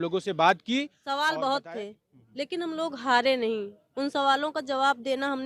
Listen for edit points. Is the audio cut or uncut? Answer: cut